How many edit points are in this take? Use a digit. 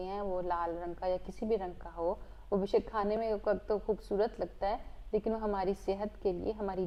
0